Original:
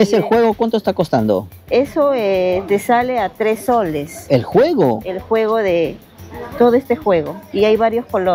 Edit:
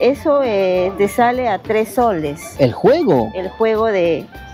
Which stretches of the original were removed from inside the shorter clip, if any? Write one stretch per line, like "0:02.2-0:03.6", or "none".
none